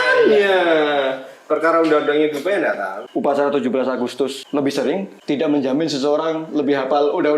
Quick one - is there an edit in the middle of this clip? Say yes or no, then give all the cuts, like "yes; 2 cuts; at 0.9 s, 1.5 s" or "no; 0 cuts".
yes; 3 cuts; at 2.9 s, 4.4 s, 5.1 s